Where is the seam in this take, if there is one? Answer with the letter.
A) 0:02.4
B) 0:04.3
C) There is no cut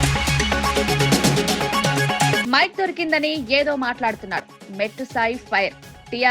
A